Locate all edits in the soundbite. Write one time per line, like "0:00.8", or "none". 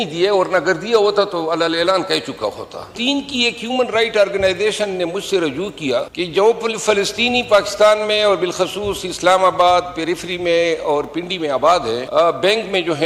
0:02.9
0:06.1
0:12.0